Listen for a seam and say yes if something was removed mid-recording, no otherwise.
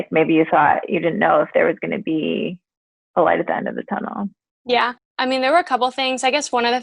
yes